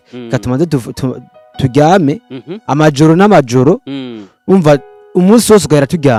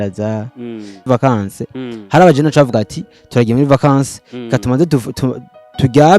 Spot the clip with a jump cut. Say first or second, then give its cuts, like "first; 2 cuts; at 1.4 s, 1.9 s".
second; 1 cut; at 1.0 s